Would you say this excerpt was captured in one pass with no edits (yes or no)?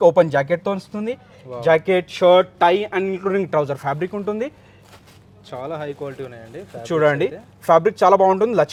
yes